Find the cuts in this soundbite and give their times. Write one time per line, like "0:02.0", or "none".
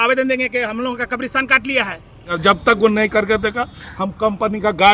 0:02.3